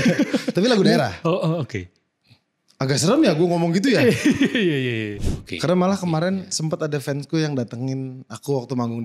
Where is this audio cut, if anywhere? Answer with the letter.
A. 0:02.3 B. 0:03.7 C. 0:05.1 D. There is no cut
C